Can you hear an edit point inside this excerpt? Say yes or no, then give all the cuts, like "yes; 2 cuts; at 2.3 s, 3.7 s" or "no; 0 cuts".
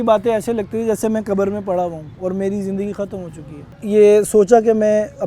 yes; 1 cut; at 3.7 s